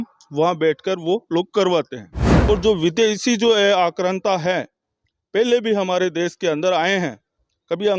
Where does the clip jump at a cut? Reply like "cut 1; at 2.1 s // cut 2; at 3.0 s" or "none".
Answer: cut 1; at 2.3 s